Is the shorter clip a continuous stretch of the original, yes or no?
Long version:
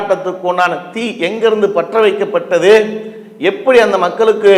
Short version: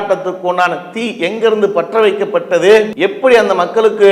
no